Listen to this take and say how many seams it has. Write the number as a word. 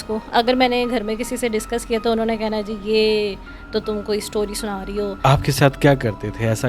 one